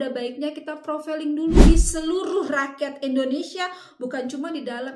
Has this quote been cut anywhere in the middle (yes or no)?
yes